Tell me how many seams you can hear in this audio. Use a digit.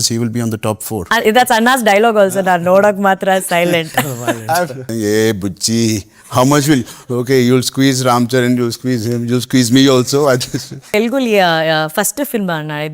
3